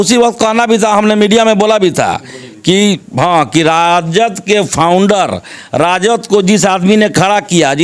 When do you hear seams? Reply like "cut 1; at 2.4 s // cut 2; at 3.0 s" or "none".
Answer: none